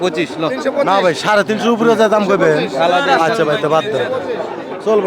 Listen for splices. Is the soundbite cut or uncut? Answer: uncut